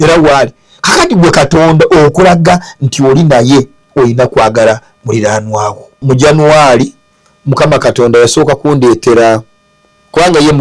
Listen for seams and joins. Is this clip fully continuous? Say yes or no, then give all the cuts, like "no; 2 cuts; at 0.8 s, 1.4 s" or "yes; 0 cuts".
no; 1 cut; at 6.0 s